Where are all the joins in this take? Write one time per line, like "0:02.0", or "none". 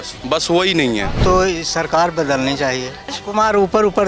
0:01.2
0:03.2